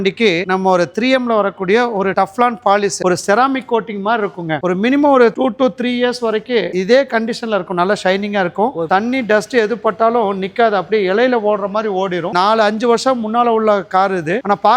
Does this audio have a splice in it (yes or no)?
yes